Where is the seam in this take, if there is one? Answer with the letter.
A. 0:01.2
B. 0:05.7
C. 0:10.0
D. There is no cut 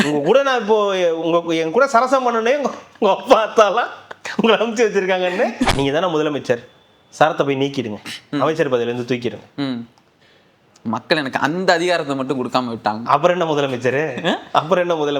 B